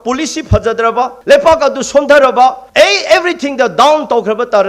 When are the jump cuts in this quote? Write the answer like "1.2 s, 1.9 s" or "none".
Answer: 1.2 s, 2.6 s

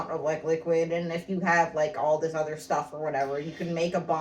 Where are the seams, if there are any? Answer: none

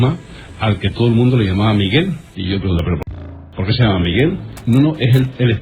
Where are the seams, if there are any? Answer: 2.3 s, 4.5 s

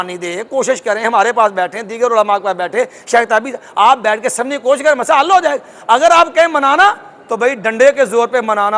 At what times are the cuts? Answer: none

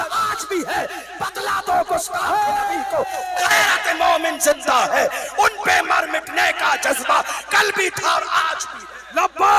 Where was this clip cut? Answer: none

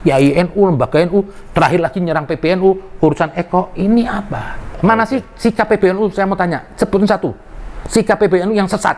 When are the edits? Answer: 4.8 s

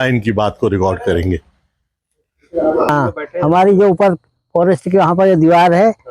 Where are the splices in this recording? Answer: 2.9 s

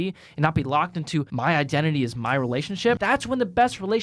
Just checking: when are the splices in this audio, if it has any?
1.3 s, 3.0 s

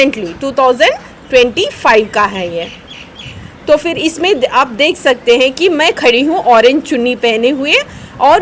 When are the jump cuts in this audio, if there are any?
none

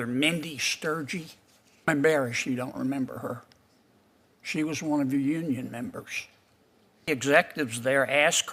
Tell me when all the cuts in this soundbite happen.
1.9 s, 7.0 s

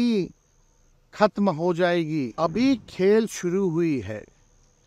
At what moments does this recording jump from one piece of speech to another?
2.3 s

